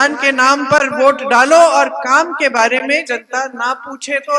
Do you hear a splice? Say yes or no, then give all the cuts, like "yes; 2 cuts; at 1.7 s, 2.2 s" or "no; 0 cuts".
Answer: no; 0 cuts